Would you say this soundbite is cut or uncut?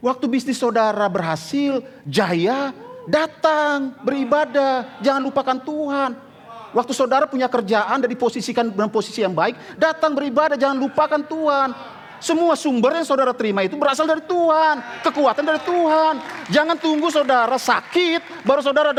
uncut